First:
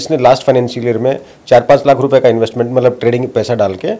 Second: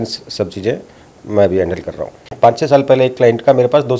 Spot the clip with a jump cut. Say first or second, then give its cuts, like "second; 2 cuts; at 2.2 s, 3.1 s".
second; 1 cut; at 2.3 s